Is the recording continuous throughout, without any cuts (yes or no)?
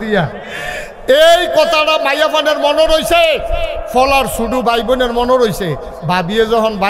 yes